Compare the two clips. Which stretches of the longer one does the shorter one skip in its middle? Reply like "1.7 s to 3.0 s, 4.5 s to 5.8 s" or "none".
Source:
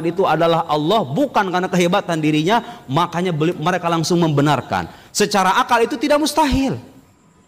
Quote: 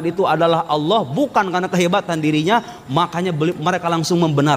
none